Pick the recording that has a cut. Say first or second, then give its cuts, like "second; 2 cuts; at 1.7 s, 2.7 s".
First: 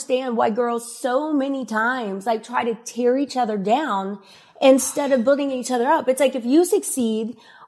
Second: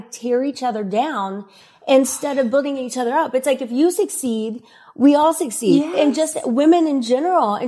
second; 1 cut; at 5.9 s